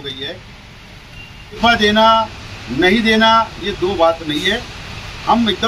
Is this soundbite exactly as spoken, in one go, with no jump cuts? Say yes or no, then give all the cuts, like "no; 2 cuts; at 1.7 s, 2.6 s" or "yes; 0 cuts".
no; 1 cut; at 1.6 s